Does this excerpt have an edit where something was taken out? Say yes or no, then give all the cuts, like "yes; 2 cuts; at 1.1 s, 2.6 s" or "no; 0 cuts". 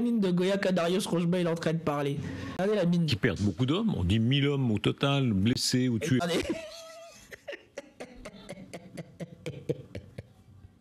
yes; 1 cut; at 2.6 s